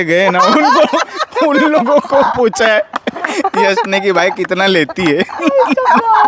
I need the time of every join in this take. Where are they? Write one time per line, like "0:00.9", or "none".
none